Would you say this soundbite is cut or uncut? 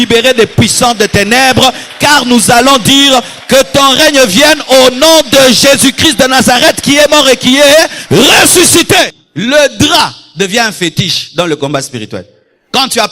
cut